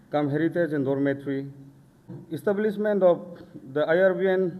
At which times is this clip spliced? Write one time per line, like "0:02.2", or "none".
0:02.2

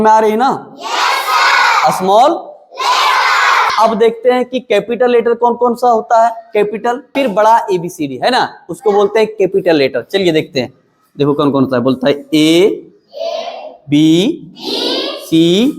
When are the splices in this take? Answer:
0:03.7
0:07.1

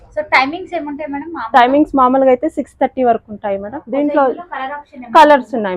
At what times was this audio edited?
0:03.7

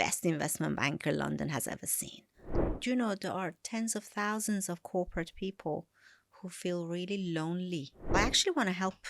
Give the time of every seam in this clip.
0:02.6
0:08.0

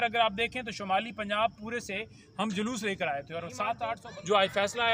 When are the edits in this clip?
0:04.0

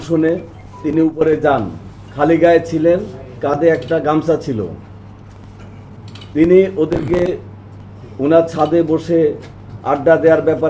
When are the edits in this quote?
none

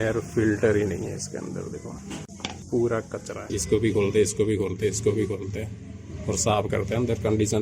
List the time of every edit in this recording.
0:03.6

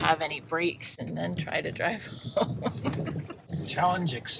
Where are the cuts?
0:03.4

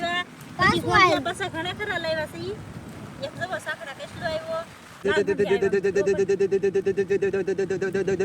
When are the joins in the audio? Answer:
0:05.0

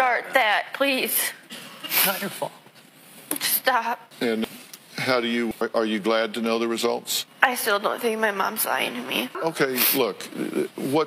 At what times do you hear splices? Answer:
0:09.4

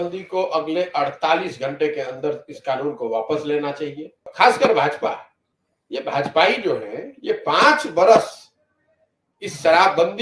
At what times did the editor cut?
0:04.2

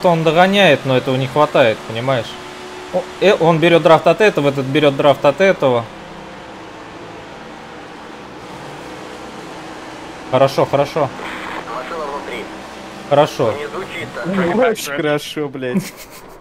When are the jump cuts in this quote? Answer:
0:14.9

